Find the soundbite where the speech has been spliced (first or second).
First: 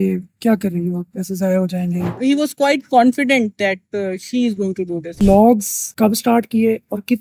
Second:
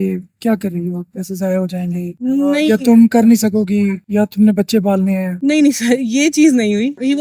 first